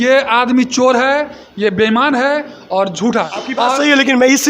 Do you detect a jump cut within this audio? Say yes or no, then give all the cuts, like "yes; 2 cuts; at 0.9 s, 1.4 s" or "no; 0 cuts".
yes; 1 cut; at 3.2 s